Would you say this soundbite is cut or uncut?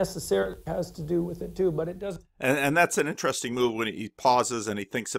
uncut